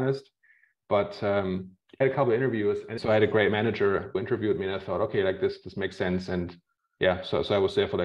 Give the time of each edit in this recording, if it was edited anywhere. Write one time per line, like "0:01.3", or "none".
0:01.8
0:02.9
0:04.2